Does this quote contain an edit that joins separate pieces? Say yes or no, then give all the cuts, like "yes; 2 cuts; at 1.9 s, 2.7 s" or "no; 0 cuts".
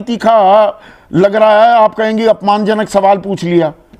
no; 0 cuts